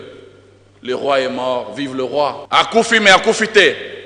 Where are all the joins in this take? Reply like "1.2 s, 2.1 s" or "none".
2.4 s